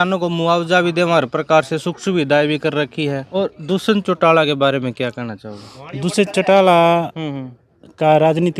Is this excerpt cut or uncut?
cut